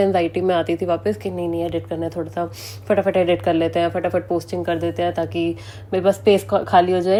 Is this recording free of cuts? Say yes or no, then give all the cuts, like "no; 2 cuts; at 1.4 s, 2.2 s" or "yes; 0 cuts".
yes; 0 cuts